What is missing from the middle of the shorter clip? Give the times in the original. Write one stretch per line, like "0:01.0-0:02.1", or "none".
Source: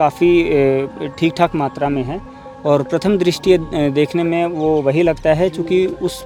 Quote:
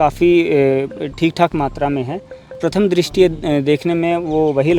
0:02.6-0:02.9